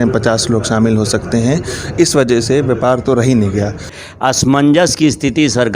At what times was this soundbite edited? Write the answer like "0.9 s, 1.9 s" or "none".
3.9 s